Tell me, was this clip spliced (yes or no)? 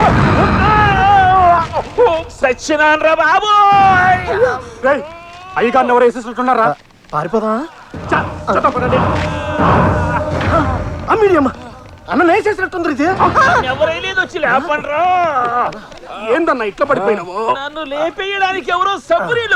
no